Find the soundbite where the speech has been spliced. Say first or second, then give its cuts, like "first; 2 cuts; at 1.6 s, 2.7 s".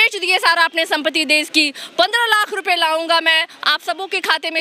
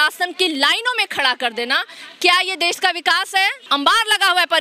second; 1 cut; at 3.6 s